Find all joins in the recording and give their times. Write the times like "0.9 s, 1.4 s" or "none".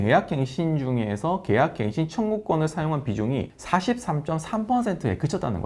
none